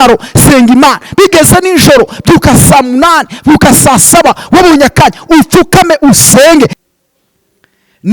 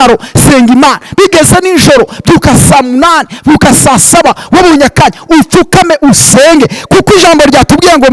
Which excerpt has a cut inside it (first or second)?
first